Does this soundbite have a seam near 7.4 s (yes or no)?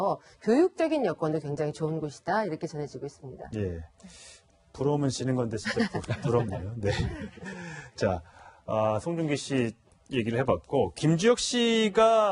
no